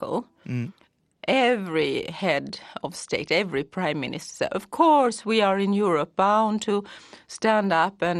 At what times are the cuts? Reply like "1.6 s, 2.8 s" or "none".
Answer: none